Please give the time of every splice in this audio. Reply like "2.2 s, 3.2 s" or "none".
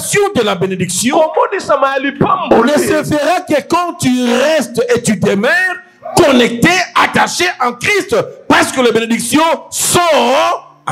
none